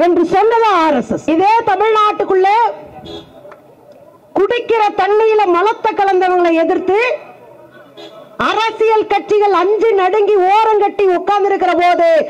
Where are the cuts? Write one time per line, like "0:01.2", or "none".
0:01.3